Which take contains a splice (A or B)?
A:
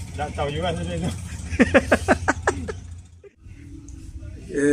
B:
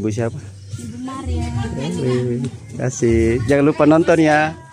A